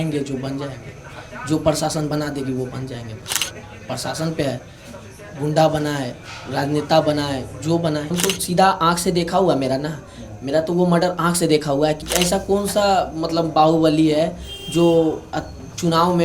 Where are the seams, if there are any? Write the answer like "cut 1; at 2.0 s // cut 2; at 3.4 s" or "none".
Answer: cut 1; at 8.1 s // cut 2; at 12.1 s